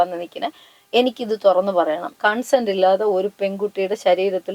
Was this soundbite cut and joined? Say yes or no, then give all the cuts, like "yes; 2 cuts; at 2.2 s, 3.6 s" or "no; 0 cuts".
yes; 1 cut; at 2.1 s